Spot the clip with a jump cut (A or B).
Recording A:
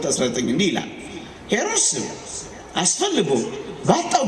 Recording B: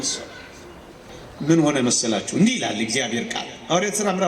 B